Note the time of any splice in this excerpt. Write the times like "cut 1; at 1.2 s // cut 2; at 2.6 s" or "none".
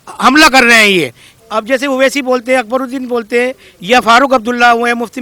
cut 1; at 1.3 s